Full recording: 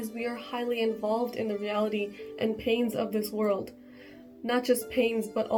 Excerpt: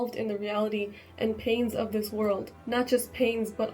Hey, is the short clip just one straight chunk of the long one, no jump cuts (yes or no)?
no